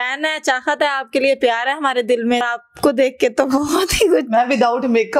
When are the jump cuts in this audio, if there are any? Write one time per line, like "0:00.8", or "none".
0:02.5